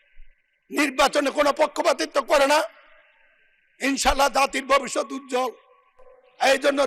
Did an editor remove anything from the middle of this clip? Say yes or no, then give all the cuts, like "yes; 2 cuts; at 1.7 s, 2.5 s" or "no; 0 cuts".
no; 0 cuts